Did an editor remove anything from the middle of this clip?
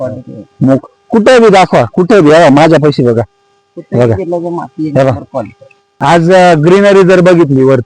yes; 1 cut; at 5.8 s

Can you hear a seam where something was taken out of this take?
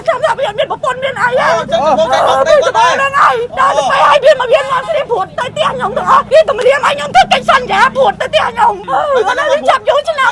yes; 3 cuts; at 3.5 s, 6.3 s, 8.8 s

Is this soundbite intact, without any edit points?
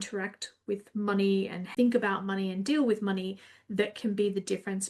no; 1 cut; at 1.7 s

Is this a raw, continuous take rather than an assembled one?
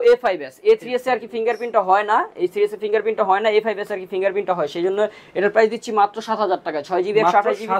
yes; 0 cuts

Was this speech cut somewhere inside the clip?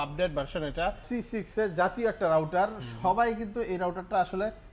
yes; 1 cut; at 1.0 s

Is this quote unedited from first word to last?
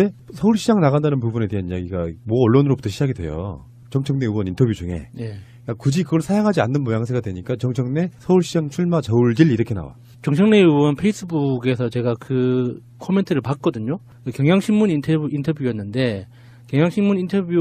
yes; 0 cuts

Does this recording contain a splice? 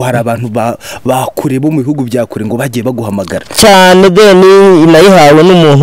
no; 0 cuts

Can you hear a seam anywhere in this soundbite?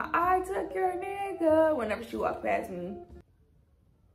no; 0 cuts

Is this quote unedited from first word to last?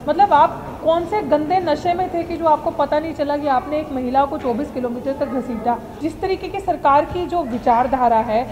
no; 1 cut; at 5.9 s

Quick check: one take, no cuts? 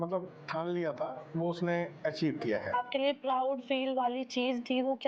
no; 1 cut; at 2.7 s

